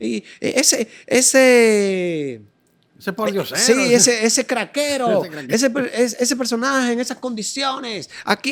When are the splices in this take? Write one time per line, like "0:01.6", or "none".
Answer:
none